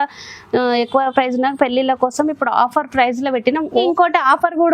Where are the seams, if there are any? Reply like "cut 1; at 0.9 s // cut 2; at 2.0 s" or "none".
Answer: cut 1; at 3.8 s